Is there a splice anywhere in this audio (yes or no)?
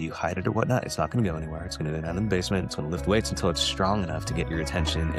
no